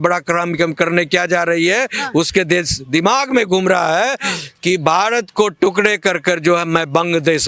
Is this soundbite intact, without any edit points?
yes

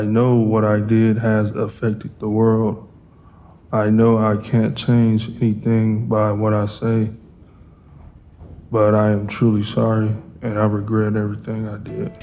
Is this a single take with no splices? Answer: yes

